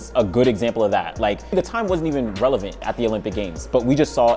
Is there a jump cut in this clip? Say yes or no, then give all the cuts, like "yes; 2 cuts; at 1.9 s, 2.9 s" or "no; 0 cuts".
yes; 2 cuts; at 1.4 s, 2.8 s